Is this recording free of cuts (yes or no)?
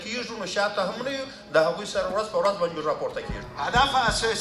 no